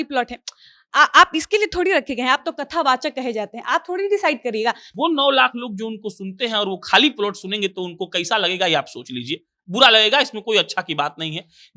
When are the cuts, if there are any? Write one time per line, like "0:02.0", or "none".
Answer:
0:04.9

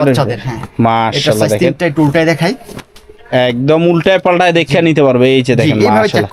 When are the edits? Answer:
none

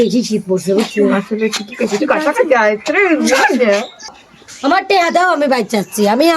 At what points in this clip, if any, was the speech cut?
0:04.2

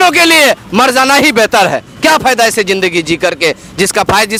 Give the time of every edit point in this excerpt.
none

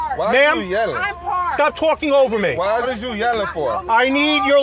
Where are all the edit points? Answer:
0:02.9

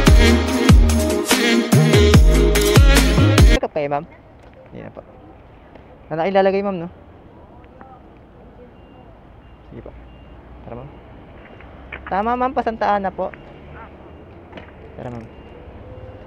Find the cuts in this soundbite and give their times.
0:03.5

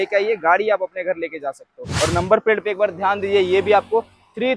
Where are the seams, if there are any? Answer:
0:01.9

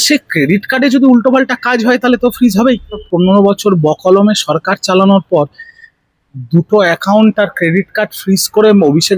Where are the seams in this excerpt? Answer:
0:03.1

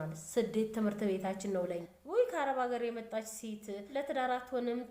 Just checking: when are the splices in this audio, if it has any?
0:01.9
0:03.8

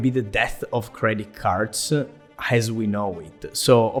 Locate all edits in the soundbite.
none

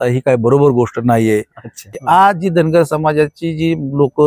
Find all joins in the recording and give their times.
0:01.9

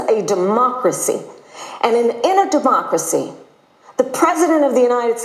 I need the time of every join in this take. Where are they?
none

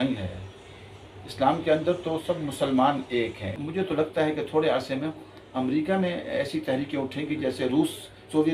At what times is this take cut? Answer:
0:03.6

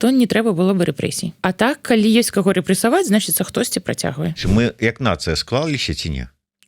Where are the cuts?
0:01.3
0:04.4

